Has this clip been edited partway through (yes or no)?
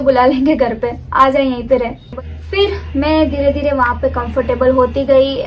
no